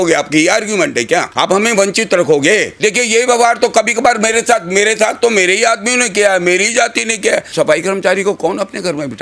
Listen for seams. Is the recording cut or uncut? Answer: cut